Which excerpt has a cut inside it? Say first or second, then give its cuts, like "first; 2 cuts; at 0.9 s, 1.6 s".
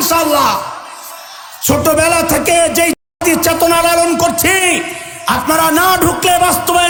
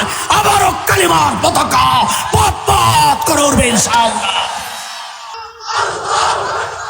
second; 1 cut; at 5.2 s